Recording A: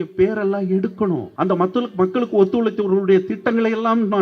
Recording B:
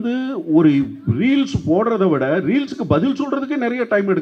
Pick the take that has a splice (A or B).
A